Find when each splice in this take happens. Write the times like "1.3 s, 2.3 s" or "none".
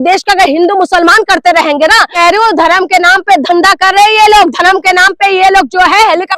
2.1 s